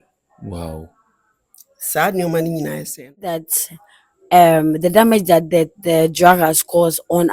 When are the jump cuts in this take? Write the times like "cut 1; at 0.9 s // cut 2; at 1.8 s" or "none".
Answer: cut 1; at 3.4 s

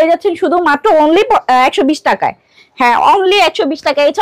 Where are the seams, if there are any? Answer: none

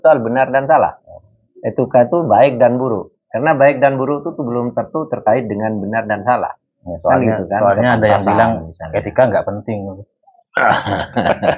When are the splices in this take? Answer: none

